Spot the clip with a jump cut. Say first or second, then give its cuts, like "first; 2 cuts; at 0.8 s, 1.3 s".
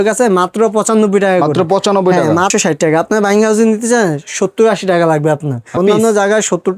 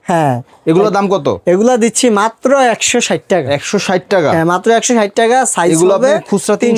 first; 2 cuts; at 2.5 s, 5.8 s